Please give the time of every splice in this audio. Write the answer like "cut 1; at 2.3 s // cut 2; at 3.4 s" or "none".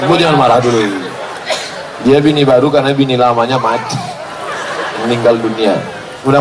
none